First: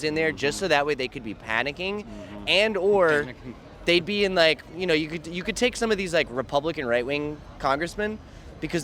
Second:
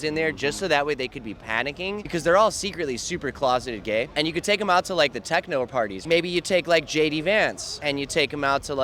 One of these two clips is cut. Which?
second; 4 cuts; at 2.0 s, 4.1 s, 6.0 s, 7.7 s

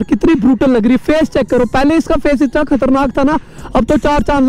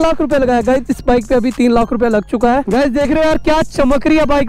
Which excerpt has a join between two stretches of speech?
second; 1 cut; at 2.7 s

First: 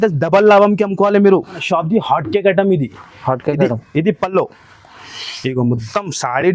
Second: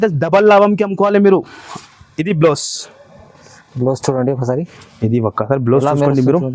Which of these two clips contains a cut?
first; 1 cut; at 1.6 s

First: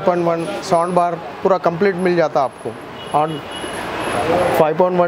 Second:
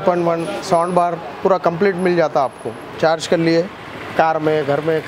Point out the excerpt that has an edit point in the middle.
second; 1 cut; at 2.9 s

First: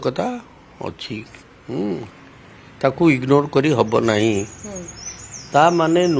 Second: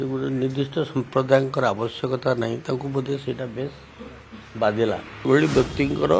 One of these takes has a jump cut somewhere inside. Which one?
second; 1 cut; at 5.3 s

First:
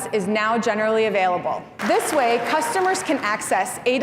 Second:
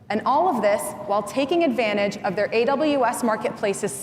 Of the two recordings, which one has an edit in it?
first; 1 cut; at 1.7 s

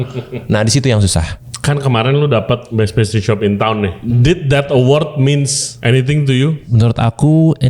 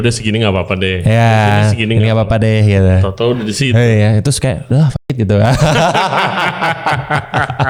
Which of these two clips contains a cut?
first; 5 cuts; at 1.4 s, 2.7 s, 4.0 s, 5.6 s, 6.6 s

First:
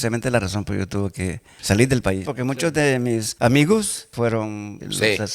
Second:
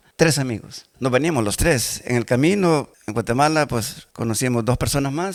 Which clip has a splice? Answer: first; 1 cut; at 2.3 s

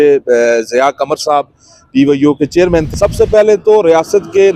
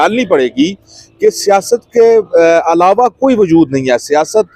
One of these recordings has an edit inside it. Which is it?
first; 1 cut; at 2.9 s

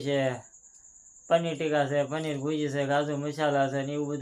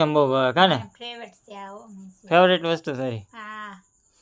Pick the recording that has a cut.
second; 1 cut; at 2.2 s

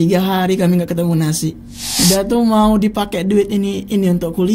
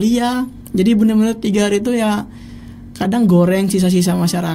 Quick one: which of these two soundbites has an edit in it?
first; 1 cut; at 1.8 s

